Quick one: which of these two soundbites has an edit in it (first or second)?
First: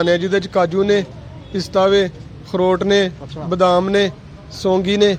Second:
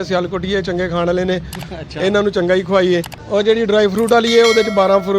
second